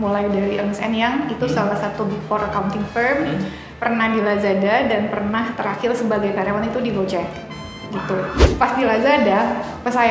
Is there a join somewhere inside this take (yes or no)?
yes